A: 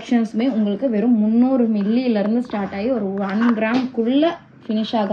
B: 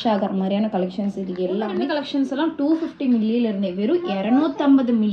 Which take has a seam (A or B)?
B